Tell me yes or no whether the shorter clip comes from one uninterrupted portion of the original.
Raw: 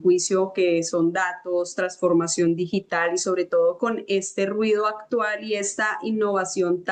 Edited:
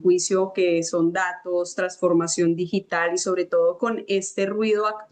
yes